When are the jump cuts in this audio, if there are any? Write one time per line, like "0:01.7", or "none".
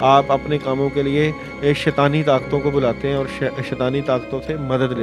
none